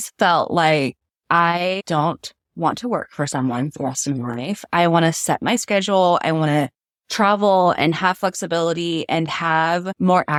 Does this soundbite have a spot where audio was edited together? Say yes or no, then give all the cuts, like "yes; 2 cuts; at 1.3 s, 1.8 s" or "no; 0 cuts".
no; 0 cuts